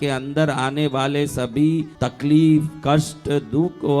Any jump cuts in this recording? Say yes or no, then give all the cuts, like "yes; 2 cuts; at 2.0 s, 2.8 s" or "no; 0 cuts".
yes; 1 cut; at 2.0 s